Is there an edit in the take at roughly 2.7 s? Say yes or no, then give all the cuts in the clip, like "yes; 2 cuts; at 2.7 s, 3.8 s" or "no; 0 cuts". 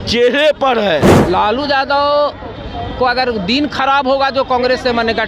no; 1 cut; at 1.1 s